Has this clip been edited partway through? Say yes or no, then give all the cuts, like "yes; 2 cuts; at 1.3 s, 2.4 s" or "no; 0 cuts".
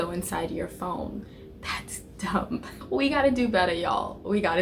yes; 1 cut; at 2.7 s